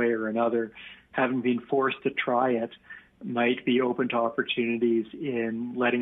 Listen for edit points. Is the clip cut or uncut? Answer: uncut